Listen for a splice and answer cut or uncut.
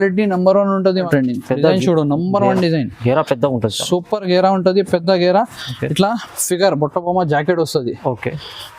cut